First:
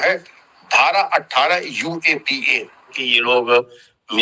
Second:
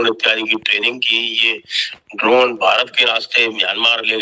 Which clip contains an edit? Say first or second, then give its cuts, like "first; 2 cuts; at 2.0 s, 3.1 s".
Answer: first; 1 cut; at 3.0 s